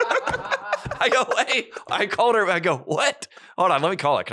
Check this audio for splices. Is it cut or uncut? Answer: uncut